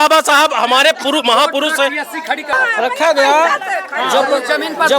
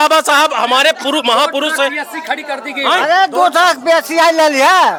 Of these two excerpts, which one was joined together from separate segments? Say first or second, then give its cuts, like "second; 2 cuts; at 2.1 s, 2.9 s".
first; 1 cut; at 2.5 s